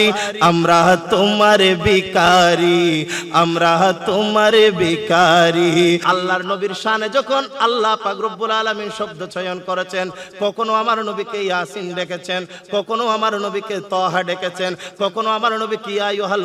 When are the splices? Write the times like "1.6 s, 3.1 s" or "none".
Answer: 6.1 s